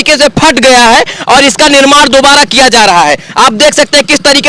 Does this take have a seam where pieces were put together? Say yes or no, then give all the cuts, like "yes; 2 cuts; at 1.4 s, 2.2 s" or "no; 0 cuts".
no; 0 cuts